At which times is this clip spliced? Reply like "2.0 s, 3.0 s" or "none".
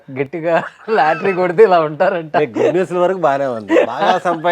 none